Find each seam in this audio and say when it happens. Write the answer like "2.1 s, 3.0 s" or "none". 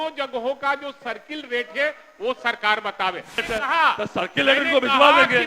3.4 s